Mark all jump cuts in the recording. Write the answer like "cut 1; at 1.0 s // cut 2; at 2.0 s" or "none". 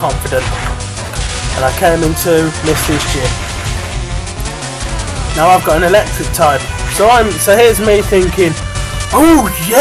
cut 1; at 8.7 s